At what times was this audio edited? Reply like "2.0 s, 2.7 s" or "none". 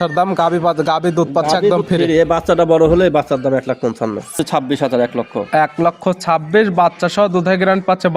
4.4 s